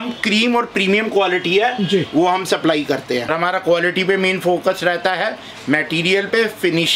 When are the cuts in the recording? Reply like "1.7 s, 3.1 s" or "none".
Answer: 3.2 s